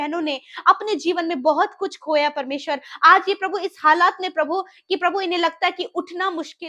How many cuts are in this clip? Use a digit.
0